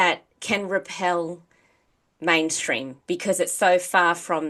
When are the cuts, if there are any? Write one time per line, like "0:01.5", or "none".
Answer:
none